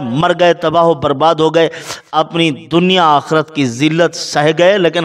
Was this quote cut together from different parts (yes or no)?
no